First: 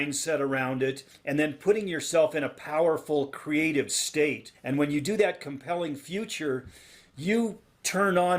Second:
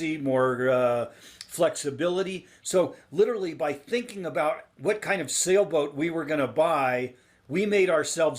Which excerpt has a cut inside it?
first; 2 cuts; at 1.1 s, 4.5 s

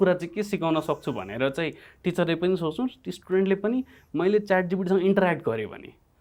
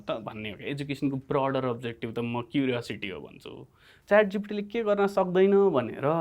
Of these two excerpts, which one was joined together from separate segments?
second; 1 cut; at 3.9 s

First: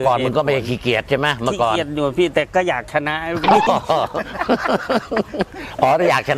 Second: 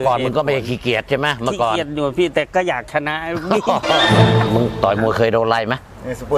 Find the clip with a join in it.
second; 1 cut; at 4.4 s

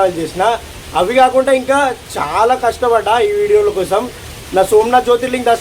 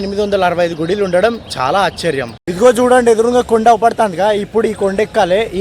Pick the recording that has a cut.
second; 1 cut; at 2.4 s

